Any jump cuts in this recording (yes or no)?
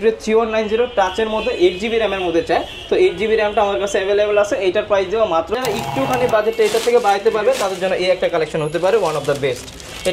yes